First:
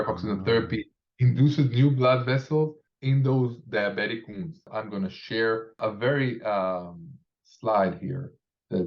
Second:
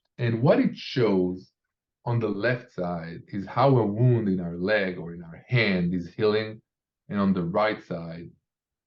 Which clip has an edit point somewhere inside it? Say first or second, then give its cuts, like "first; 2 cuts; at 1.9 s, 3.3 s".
first; 3 cuts; at 2.9 s, 4.7 s, 5.8 s